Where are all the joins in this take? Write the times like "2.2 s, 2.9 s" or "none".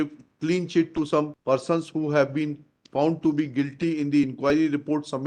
none

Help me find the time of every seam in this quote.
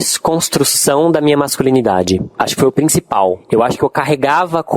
2.4 s, 3.4 s

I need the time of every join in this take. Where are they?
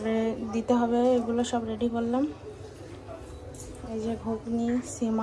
none

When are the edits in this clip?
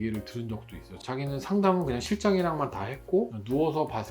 0.9 s

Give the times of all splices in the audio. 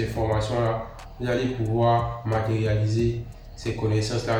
none

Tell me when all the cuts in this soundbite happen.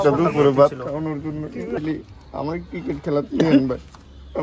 1.8 s

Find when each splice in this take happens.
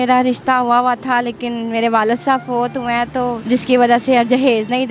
3.4 s

